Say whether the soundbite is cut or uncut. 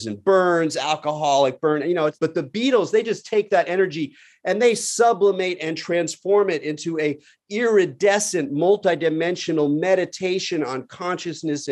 cut